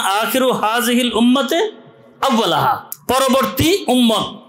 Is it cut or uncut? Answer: cut